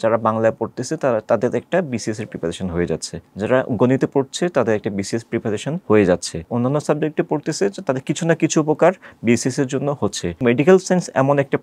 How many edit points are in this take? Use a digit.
4